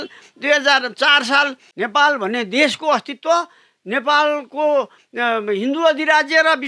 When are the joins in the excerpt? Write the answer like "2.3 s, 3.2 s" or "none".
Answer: 1.6 s

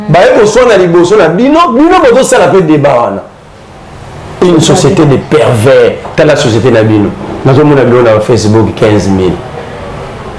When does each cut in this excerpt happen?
4.4 s

